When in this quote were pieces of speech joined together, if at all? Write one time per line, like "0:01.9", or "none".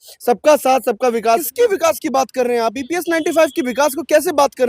0:01.4